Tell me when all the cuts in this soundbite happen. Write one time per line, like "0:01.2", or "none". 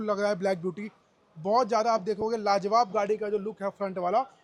none